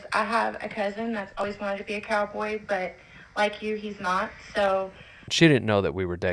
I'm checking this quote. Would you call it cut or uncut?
cut